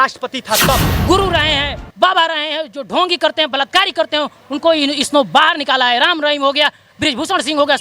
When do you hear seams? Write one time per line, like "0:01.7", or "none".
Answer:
0:00.9